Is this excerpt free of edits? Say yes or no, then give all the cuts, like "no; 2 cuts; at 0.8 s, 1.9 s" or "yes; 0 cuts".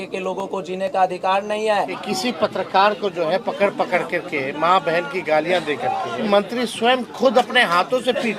no; 2 cuts; at 2.0 s, 6.2 s